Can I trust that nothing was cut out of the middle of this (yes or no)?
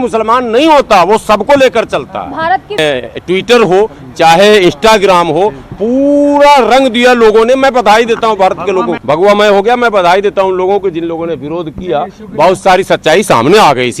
no